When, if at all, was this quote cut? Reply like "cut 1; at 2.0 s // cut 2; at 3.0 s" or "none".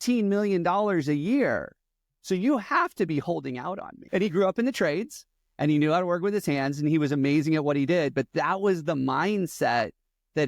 cut 1; at 3.9 s